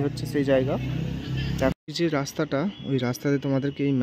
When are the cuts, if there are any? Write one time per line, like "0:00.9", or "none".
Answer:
0:01.7